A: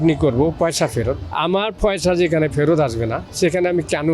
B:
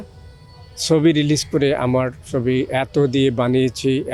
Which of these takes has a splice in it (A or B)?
A